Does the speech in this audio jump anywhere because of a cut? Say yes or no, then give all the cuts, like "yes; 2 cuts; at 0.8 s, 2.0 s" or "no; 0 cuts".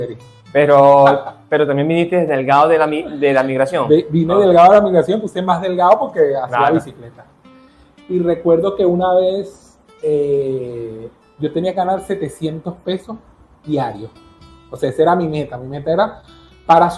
no; 0 cuts